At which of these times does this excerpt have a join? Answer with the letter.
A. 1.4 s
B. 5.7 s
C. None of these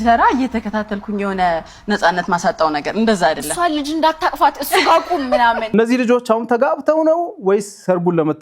B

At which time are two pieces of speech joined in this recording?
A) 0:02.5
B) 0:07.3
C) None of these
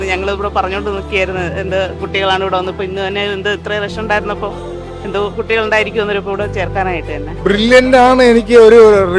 B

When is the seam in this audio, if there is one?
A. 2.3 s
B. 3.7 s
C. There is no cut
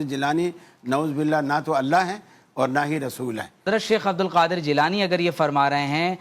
B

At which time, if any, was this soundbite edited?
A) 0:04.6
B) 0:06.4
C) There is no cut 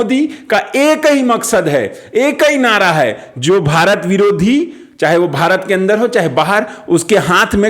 C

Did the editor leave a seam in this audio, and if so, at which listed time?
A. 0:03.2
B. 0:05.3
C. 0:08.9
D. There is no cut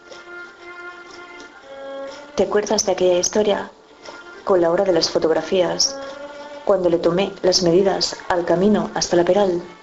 A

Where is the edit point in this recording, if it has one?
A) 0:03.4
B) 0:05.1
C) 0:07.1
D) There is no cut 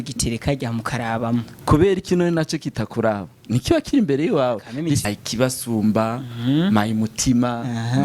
B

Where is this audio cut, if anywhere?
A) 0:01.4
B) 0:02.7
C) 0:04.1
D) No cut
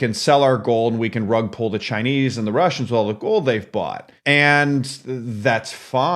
C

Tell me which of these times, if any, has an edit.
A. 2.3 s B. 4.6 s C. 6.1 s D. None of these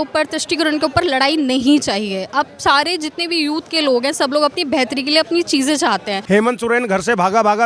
C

